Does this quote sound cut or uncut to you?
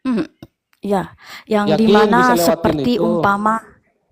uncut